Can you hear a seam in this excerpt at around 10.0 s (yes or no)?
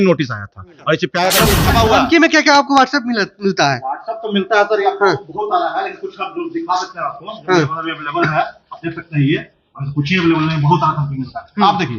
no